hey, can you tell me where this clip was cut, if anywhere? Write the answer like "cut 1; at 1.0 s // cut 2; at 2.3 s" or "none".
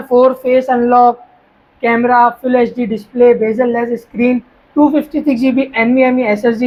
none